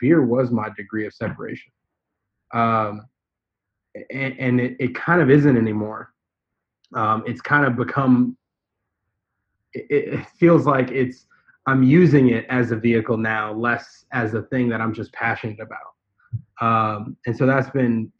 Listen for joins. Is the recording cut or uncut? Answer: uncut